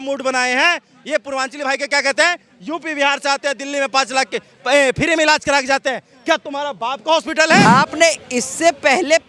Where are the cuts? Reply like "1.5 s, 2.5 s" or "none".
7.6 s